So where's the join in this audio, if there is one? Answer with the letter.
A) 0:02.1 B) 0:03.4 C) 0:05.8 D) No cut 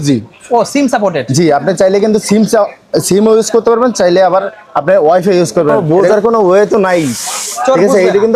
C